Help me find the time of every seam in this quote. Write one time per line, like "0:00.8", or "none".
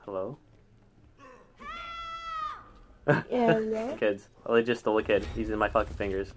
0:04.0